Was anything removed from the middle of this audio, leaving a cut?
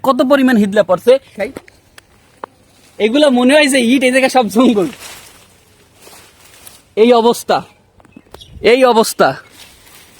yes; 1 cut; at 1.4 s

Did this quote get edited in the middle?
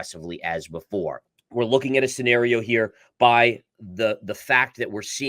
yes; 1 cut; at 1.2 s

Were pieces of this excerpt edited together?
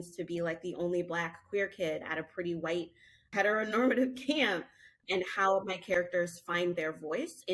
yes; 2 cuts; at 3.3 s, 5.0 s

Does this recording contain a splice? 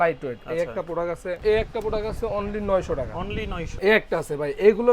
yes; 2 cuts; at 1.4 s, 3.6 s

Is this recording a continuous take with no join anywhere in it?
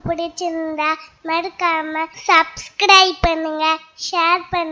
no; 1 cut; at 2.1 s

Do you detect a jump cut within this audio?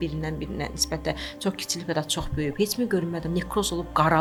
no; 0 cuts

